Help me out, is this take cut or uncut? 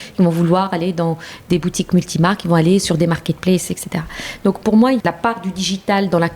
cut